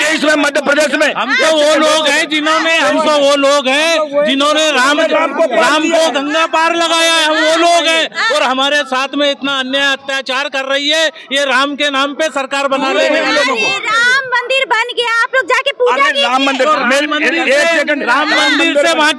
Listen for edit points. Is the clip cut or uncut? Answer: uncut